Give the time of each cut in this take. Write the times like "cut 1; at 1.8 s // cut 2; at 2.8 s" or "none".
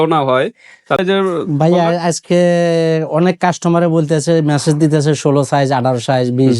cut 1; at 1.0 s